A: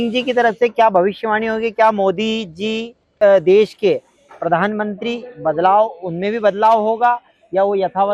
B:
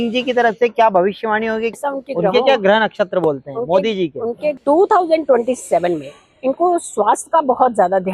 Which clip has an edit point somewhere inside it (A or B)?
B